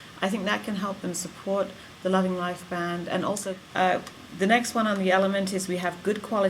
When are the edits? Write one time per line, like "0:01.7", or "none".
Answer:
0:03.5